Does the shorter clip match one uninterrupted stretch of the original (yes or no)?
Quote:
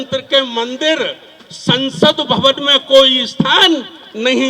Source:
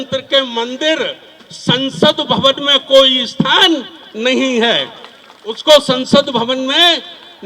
yes